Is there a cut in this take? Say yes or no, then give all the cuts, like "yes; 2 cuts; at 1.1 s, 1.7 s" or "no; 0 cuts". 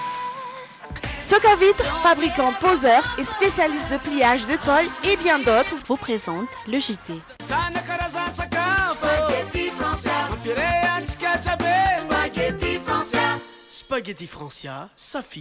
yes; 2 cuts; at 0.9 s, 7.3 s